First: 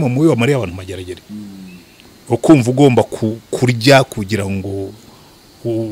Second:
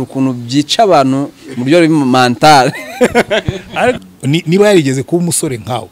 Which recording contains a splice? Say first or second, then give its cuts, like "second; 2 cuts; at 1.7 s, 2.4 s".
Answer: second; 1 cut; at 4.0 s